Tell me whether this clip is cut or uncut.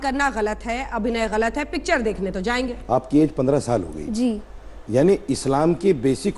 cut